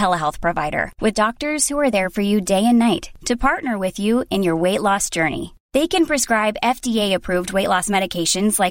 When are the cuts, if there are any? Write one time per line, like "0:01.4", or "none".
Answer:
none